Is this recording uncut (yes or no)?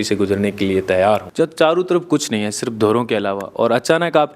no